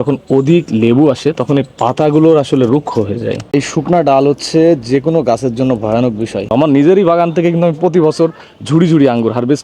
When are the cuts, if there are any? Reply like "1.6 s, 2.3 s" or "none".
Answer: 3.4 s, 6.5 s

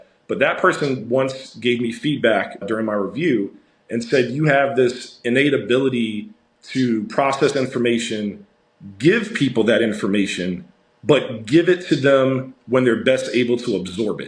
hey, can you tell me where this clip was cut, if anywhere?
2.6 s

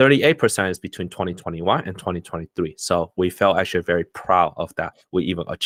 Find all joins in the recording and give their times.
none

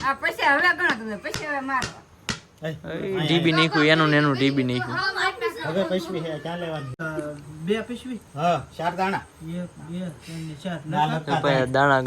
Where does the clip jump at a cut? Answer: 7.0 s

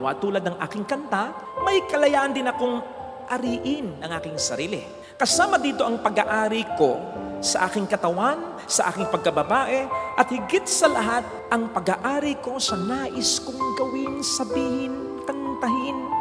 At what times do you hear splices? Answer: none

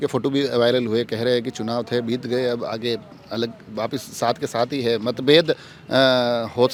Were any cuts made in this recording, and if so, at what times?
none

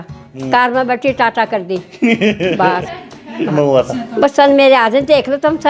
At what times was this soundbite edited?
3.5 s

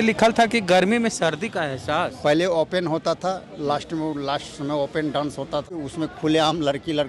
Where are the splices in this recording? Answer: 2.1 s, 5.7 s

